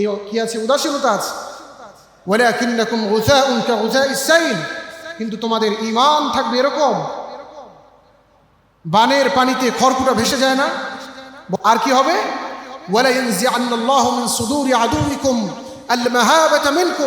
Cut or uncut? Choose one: cut